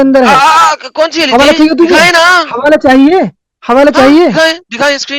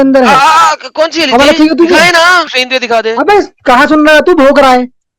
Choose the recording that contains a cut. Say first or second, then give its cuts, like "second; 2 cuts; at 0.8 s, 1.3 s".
second; 1 cut; at 2.5 s